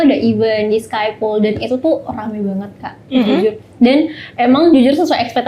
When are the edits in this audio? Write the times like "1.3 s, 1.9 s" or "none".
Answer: none